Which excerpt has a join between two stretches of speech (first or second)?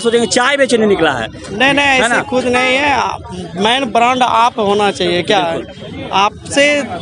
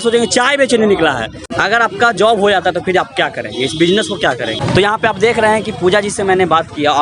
second